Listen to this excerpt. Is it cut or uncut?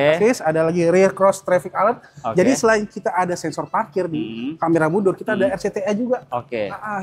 uncut